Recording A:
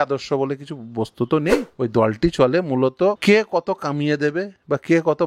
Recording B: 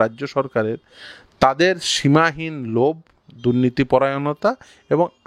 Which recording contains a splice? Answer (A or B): A